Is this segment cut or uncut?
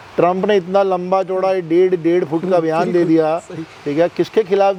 uncut